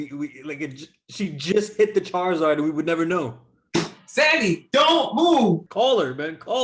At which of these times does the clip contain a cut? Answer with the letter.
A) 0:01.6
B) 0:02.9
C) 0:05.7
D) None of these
C